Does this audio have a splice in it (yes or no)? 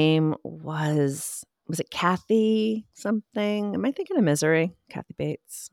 no